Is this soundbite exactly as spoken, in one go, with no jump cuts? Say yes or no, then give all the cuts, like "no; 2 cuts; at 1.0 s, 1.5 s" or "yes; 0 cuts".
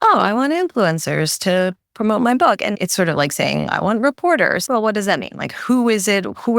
no; 2 cuts; at 3.2 s, 4.6 s